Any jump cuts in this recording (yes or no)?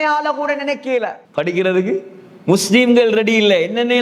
yes